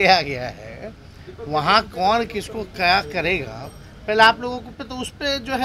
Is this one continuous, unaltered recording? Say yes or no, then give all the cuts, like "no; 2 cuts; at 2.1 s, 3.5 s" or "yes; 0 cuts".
yes; 0 cuts